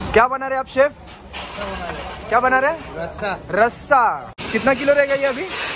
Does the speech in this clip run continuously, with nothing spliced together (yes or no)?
no